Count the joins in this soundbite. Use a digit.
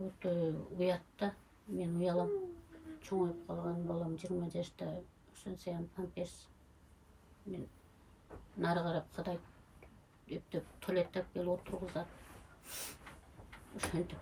0